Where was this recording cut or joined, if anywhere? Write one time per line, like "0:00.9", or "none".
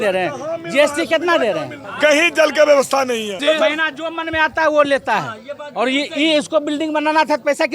0:01.8
0:03.4